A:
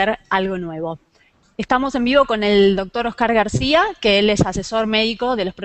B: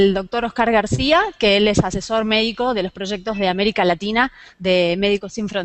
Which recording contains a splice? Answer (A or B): B